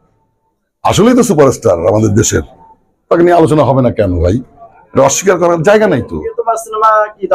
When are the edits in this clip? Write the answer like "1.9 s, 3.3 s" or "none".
6.4 s